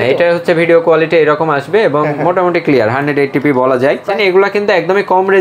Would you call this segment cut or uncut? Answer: cut